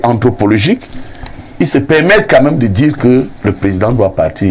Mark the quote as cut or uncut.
uncut